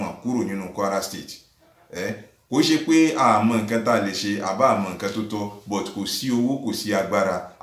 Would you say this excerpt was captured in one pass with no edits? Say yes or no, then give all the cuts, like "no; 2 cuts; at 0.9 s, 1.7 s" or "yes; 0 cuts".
yes; 0 cuts